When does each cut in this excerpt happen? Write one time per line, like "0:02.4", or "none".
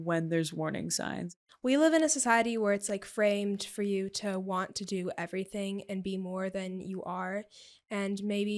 0:01.3